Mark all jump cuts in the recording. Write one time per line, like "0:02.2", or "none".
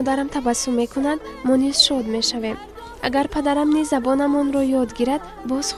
none

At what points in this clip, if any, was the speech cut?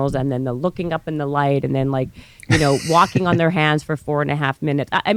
none

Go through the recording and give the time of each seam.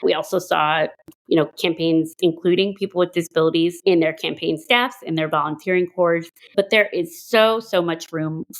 0:03.8
0:06.4

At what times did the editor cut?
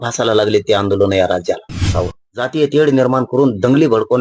0:01.9

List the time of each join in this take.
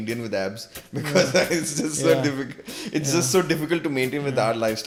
none

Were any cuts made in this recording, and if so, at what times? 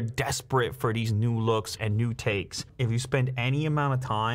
0:02.7

